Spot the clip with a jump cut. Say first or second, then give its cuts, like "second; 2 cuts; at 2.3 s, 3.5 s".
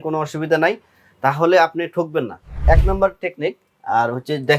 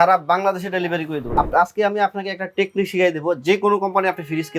second; 1 cut; at 1.2 s